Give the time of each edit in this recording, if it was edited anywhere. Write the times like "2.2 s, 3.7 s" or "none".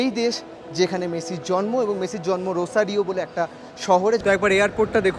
4.2 s